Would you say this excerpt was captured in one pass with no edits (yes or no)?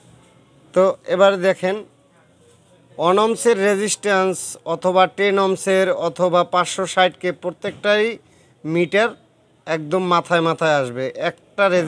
yes